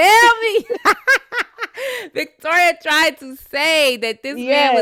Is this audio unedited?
yes; 0 cuts

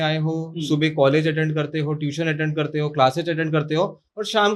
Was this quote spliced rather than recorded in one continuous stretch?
no; 0 cuts

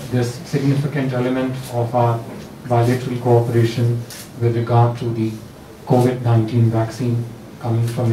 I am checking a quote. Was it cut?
no; 0 cuts

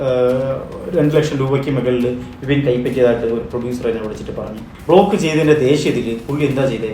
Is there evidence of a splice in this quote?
yes; 1 cut; at 4.7 s

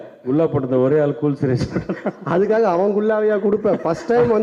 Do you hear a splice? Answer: no; 0 cuts

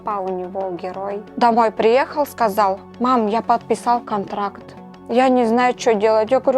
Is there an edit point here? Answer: yes; 2 cuts; at 1.3 s, 5.0 s

